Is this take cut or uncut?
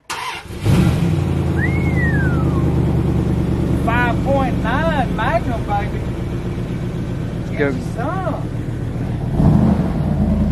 uncut